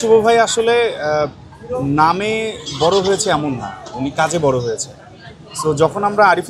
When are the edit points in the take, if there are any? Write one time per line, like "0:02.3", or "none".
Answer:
none